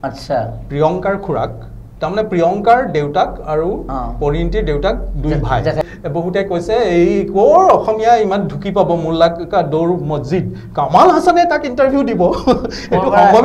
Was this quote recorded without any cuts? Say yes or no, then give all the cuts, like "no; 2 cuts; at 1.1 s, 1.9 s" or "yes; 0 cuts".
no; 1 cut; at 5.8 s